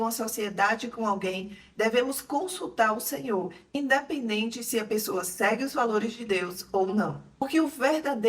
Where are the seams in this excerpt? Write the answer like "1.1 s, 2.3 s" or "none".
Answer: 7.2 s